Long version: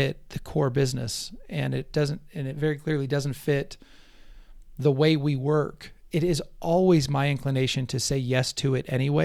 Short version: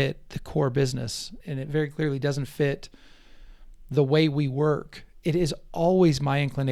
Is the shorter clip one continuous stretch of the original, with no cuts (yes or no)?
no